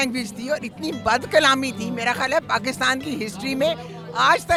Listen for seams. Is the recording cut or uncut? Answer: uncut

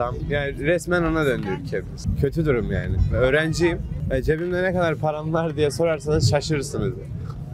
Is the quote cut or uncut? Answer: uncut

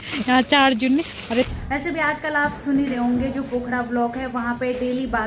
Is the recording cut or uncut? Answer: cut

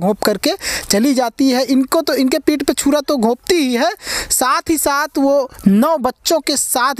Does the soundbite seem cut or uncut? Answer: uncut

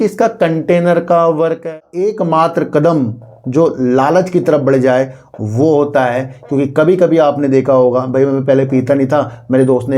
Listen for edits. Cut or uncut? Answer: cut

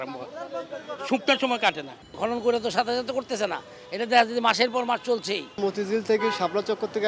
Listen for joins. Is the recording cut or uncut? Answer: cut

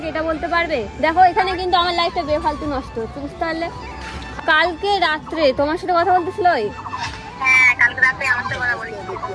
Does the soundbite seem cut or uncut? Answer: cut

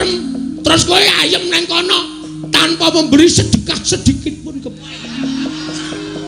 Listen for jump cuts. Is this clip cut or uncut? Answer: uncut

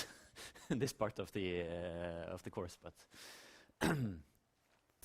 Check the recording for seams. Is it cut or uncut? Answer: uncut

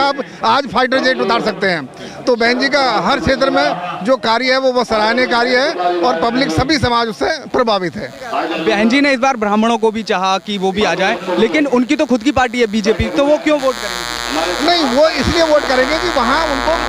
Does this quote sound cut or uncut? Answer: uncut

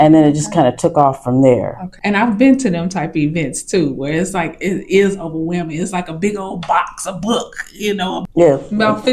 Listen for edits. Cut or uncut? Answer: cut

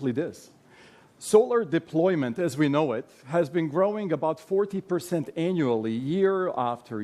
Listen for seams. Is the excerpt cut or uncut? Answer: cut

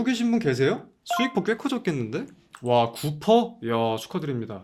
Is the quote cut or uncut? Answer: uncut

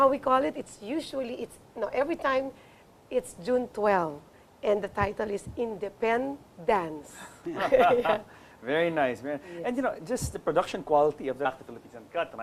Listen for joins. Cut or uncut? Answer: uncut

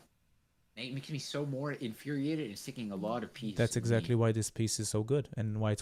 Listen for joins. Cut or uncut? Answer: uncut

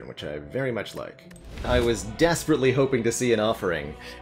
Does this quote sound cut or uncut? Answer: cut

